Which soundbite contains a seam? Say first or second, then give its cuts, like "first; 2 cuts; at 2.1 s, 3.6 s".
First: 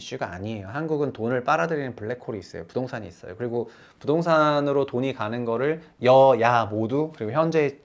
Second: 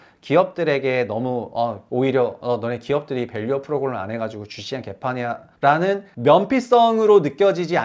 second; 3 cuts; at 1.8 s, 5.5 s, 6.1 s